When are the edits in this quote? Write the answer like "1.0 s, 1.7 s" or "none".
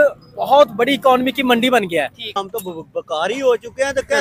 2.4 s